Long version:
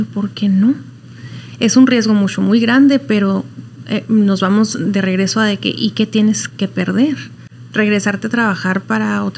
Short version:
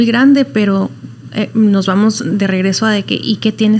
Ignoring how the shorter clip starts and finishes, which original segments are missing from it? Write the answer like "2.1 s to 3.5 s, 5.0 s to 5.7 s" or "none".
none